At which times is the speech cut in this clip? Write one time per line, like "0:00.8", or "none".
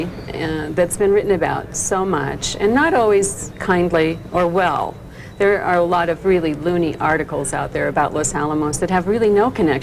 0:03.2